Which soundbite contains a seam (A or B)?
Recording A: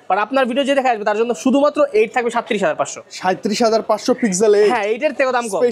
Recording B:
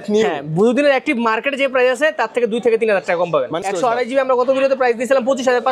B